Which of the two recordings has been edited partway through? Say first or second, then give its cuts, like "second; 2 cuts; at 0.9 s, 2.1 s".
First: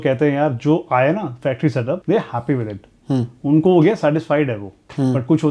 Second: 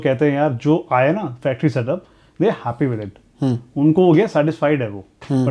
first; 1 cut; at 2.0 s